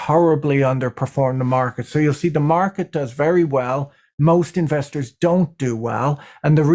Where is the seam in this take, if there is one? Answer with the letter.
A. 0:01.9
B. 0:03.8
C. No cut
C